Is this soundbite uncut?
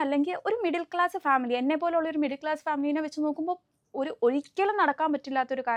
yes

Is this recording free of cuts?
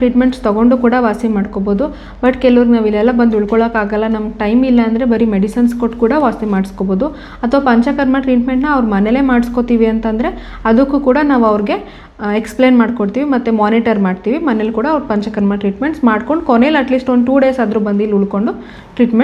yes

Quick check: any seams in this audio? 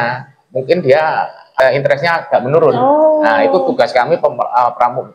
yes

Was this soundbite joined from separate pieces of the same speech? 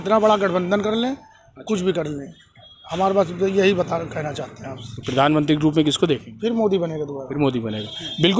no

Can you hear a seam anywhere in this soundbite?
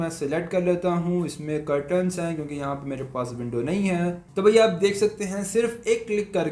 yes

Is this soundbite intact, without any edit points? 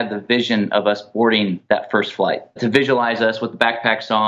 no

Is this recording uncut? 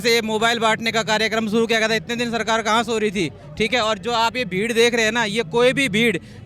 yes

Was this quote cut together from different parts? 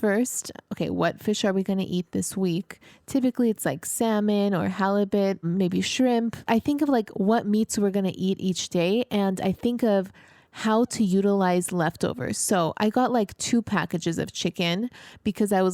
yes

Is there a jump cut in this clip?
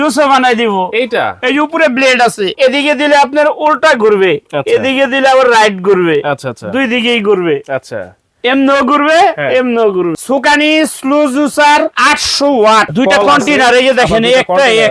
yes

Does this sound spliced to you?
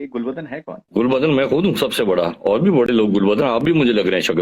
no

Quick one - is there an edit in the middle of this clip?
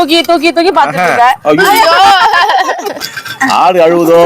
yes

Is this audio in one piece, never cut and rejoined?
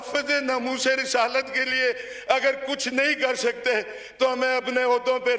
yes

